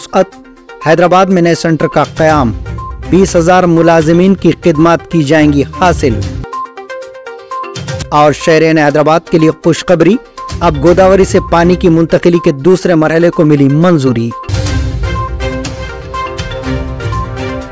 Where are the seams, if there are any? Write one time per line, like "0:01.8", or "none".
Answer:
0:14.4